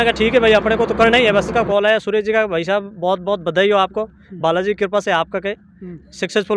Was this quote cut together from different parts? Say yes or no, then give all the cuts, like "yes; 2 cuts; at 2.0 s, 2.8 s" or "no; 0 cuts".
yes; 1 cut; at 1.5 s